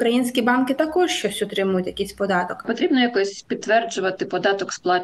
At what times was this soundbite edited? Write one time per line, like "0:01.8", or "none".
0:02.6

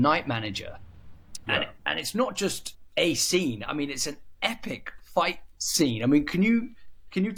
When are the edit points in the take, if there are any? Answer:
none

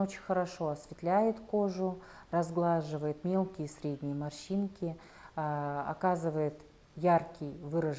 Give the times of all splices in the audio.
none

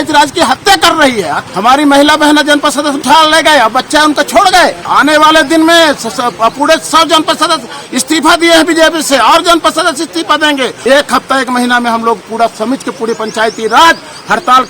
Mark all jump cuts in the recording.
0:01.4
0:03.0
0:04.9
0:10.8

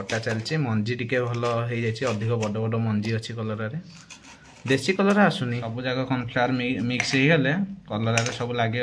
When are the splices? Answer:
0:05.7

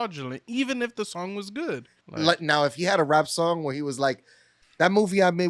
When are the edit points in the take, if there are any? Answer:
0:02.0

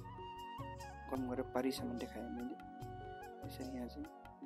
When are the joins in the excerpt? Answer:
0:01.0

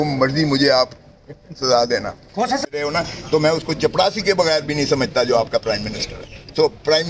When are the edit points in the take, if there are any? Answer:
0:02.7

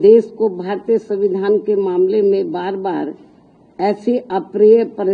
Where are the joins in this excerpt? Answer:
none

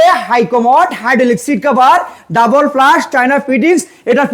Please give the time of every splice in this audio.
none

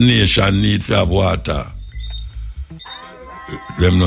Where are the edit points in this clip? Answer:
0:02.8

